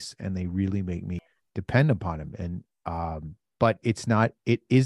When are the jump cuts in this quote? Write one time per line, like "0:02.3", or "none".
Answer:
0:01.3